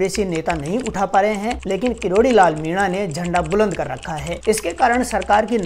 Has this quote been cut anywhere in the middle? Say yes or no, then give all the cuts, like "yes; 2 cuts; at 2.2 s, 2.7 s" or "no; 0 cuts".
no; 0 cuts